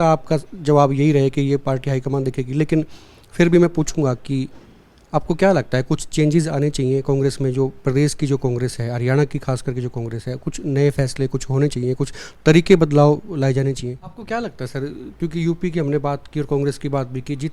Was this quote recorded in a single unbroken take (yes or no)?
no